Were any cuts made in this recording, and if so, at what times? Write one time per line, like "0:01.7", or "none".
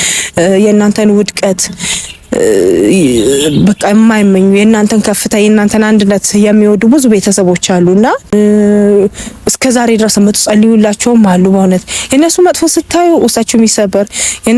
0:08.3